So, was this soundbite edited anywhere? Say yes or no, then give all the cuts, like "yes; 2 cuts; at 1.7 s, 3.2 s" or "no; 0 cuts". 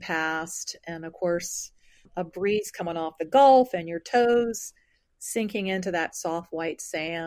yes; 1 cut; at 2.1 s